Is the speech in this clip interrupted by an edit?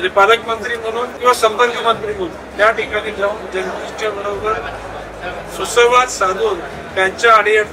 yes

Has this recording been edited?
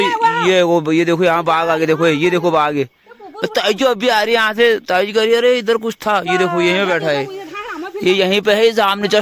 no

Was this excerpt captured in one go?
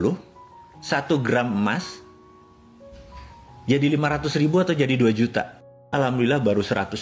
no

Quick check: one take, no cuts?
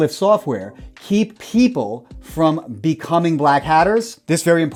yes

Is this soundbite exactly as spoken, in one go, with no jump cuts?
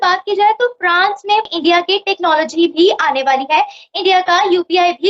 yes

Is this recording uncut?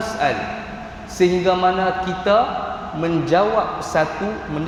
yes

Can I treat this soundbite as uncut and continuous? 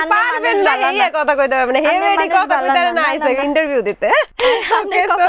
no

